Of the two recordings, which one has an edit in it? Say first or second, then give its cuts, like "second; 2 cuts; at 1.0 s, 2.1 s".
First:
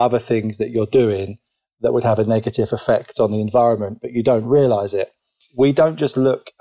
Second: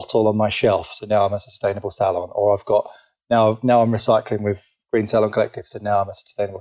first; 1 cut; at 5.4 s